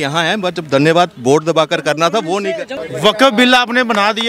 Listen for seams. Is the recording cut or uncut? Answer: cut